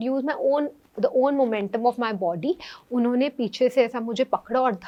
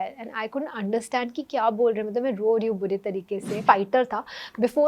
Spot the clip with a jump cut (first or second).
second